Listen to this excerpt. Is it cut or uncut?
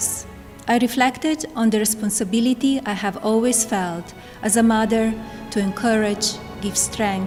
uncut